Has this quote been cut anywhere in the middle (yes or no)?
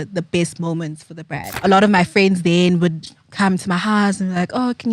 yes